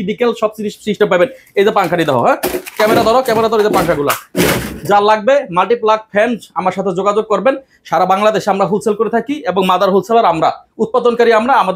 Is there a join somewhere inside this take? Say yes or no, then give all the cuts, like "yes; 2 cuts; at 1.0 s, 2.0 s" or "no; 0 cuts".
no; 0 cuts